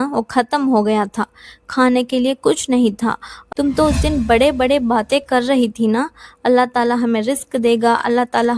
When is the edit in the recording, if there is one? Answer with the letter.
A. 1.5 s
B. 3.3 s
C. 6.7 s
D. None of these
B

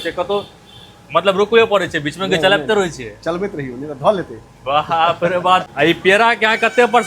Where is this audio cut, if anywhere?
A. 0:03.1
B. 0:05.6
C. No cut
B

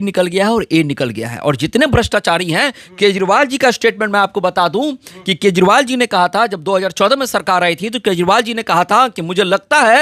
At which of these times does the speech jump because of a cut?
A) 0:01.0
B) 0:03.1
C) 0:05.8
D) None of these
D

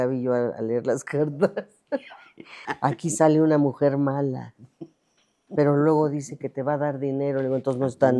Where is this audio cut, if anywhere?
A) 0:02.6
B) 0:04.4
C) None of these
A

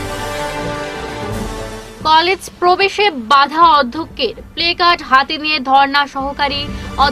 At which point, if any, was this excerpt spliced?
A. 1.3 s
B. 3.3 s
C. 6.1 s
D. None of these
A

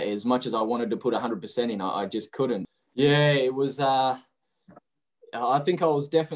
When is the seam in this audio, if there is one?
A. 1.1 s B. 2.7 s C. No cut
B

